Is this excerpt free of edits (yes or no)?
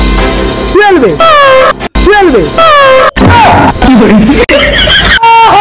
yes